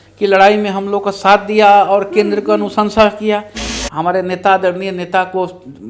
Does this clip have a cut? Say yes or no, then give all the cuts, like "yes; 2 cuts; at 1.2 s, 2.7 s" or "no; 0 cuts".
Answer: yes; 1 cut; at 3.7 s